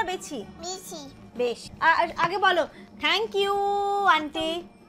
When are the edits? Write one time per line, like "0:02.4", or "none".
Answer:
0:01.7

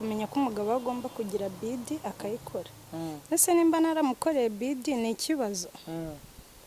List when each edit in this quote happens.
none

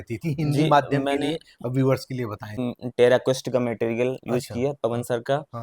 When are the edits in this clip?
0:02.6

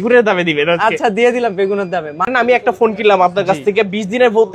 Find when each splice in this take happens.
0:02.3

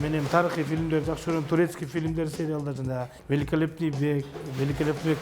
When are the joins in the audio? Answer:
0:03.1

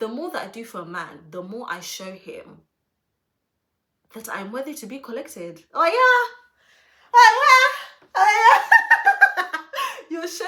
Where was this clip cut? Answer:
none

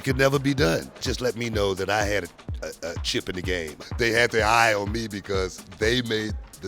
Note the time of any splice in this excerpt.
0:01.0
0:03.8

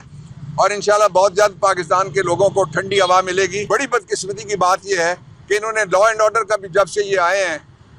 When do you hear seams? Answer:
0:03.6

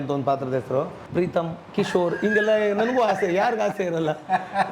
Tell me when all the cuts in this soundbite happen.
0:01.0

